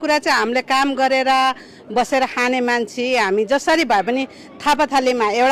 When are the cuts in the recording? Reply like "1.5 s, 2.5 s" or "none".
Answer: none